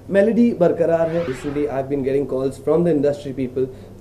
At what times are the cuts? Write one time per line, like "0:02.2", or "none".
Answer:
0:01.4